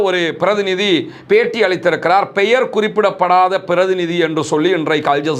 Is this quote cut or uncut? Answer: uncut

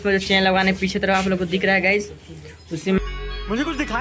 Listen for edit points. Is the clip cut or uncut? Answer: uncut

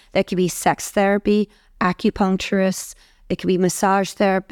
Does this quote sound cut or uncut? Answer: uncut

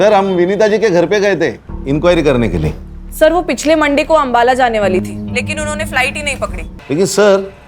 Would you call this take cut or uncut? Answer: cut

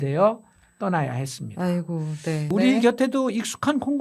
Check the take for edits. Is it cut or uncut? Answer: cut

